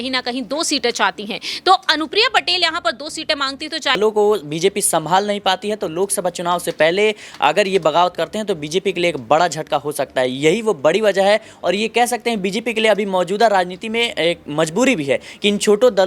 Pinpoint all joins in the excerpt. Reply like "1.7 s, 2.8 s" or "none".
4.0 s